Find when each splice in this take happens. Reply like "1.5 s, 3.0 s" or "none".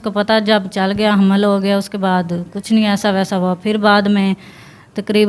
none